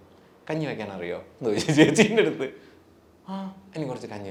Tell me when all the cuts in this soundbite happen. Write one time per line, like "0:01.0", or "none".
none